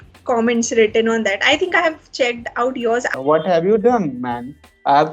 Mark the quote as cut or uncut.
cut